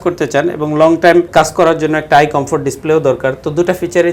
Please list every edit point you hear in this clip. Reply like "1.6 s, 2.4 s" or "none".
1.3 s